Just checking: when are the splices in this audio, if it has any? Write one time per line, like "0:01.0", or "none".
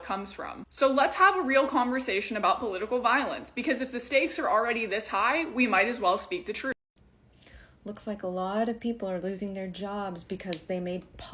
0:06.7